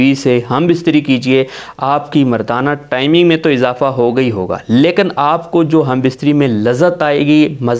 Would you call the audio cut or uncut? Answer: uncut